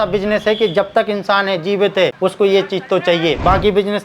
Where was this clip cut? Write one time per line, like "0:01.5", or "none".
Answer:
0:02.1